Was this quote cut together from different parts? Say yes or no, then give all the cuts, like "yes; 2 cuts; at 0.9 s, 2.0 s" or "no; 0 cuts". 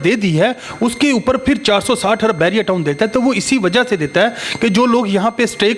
no; 0 cuts